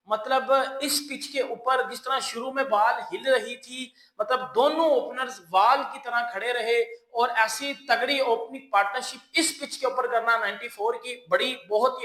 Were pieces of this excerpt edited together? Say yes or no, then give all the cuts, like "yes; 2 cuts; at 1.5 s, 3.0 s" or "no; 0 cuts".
no; 0 cuts